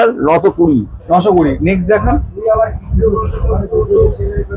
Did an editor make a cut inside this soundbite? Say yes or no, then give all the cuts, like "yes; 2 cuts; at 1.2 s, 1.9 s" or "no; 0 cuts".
no; 0 cuts